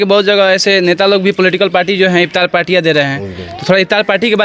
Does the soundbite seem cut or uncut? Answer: uncut